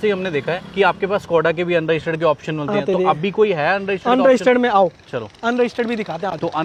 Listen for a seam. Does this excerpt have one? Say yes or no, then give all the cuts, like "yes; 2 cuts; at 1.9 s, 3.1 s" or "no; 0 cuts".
no; 0 cuts